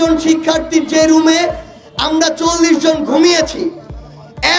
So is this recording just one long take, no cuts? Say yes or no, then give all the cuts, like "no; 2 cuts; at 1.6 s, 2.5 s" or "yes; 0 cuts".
yes; 0 cuts